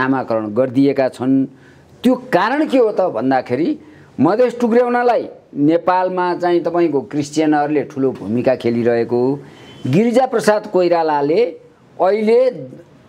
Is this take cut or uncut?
uncut